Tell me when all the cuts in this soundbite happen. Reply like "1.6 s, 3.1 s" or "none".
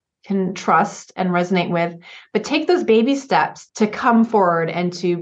3.6 s

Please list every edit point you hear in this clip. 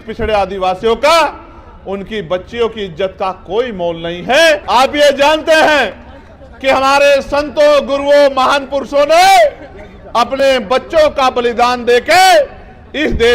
4.6 s

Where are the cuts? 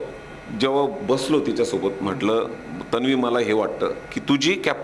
none

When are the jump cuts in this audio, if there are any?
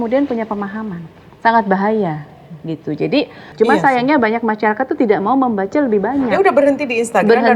3.4 s

